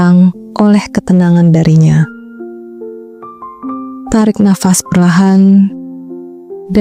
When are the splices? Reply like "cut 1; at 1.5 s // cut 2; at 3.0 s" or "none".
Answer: none